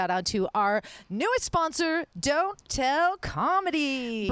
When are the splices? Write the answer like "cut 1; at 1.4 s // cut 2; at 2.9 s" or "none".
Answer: none